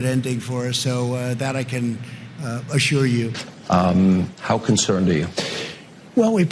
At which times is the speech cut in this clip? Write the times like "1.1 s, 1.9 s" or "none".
3.3 s